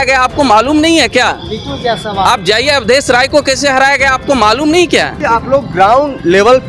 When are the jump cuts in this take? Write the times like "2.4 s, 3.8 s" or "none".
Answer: 5.2 s